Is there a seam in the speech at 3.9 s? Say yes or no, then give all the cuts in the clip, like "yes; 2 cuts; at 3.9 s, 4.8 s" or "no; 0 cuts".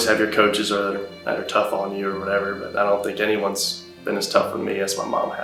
no; 0 cuts